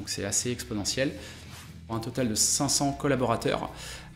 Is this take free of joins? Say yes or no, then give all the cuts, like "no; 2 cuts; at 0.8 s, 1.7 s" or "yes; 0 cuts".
no; 1 cut; at 1.8 s